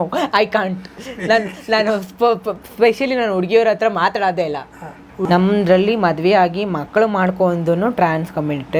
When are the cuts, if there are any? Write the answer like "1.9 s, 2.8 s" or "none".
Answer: 5.1 s

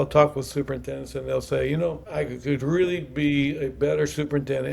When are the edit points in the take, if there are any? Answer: 2.0 s

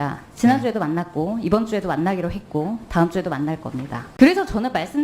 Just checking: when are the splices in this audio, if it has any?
4.0 s

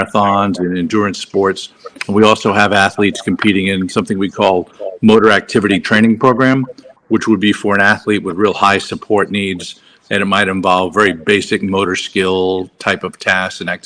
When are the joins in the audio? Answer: none

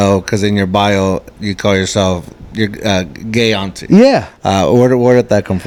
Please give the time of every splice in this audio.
none

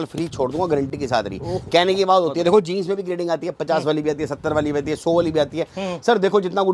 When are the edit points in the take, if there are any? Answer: none

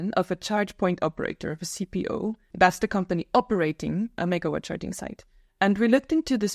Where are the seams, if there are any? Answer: 2.4 s, 4.1 s

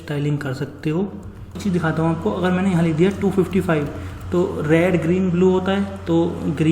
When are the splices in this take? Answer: 1.6 s

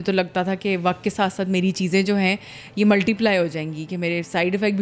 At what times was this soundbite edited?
none

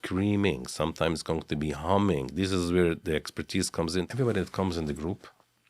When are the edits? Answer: 4.1 s

